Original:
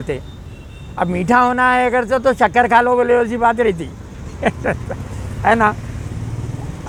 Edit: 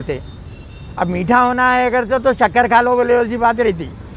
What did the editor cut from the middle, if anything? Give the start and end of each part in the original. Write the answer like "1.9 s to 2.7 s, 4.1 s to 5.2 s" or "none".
none